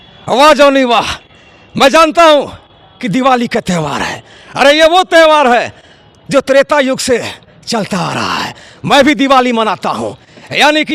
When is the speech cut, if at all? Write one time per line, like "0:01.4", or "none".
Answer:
none